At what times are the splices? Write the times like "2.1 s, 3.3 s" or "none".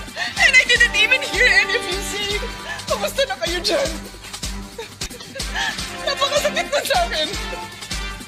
6.4 s